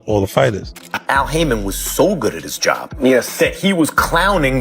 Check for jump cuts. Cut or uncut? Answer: cut